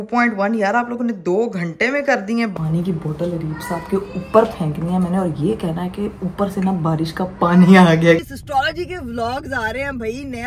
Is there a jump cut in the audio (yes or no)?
yes